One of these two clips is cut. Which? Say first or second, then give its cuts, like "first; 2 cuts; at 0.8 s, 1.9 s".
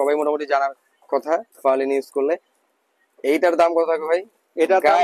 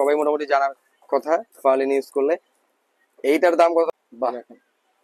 second; 1 cut; at 3.9 s